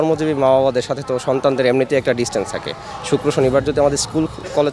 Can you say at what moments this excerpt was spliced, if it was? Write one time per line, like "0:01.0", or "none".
none